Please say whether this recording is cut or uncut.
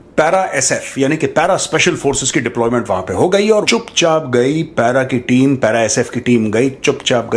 cut